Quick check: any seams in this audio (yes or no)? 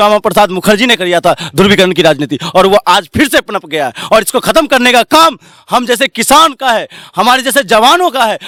no